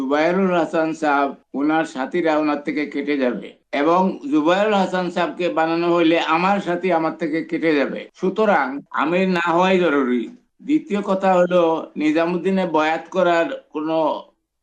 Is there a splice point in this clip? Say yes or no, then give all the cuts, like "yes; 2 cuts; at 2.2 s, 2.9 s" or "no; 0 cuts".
yes; 1 cut; at 10.3 s